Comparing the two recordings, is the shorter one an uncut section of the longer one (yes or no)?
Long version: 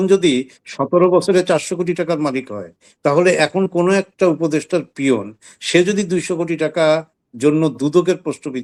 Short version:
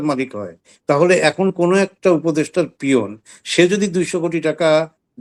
yes